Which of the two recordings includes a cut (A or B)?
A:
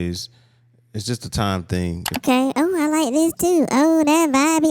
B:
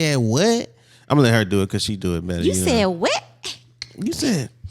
A